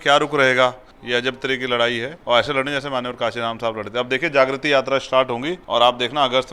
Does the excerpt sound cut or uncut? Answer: cut